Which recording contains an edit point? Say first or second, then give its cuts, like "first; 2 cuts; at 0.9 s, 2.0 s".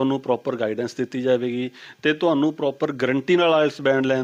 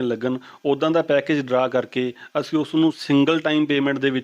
second; 1 cut; at 3.0 s